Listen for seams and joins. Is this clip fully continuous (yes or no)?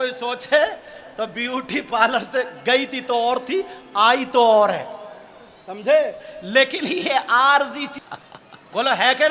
no